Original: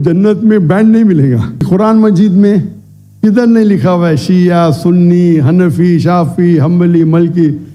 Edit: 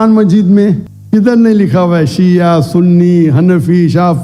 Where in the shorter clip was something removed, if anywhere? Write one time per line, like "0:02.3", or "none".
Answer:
0:00.9